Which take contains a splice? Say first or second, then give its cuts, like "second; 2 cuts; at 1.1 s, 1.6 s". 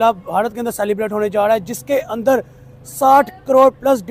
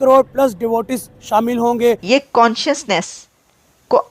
second; 1 cut; at 2.0 s